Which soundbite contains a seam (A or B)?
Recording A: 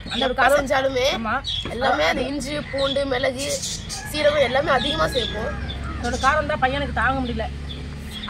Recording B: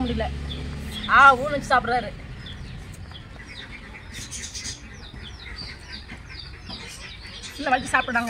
B